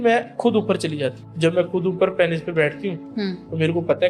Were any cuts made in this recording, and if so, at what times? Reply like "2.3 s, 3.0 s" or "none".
1.2 s